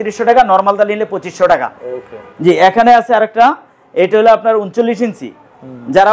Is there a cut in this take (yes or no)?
no